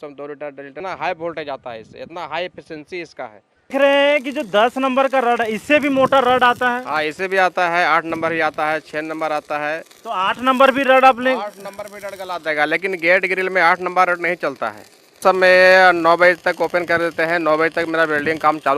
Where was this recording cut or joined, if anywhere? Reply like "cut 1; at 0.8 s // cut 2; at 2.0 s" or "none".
cut 1; at 0.8 s // cut 2; at 3.6 s // cut 3; at 15.2 s

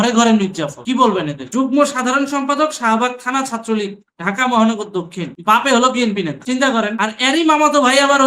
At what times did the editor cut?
cut 1; at 1.5 s

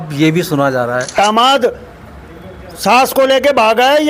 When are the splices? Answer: cut 1; at 1.1 s

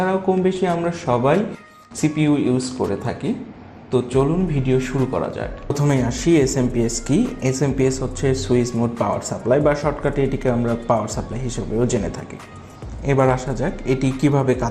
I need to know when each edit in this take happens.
cut 1; at 5.7 s

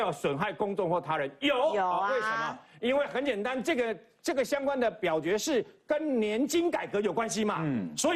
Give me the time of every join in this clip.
none

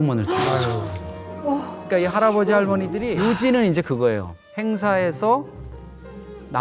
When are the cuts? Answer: cut 1; at 3.1 s

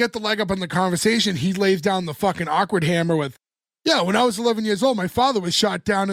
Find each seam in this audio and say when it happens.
none

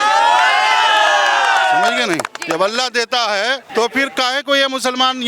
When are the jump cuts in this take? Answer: cut 1; at 3.6 s

